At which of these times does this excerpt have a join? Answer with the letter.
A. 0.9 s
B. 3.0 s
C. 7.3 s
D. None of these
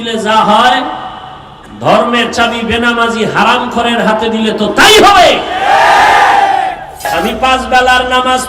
C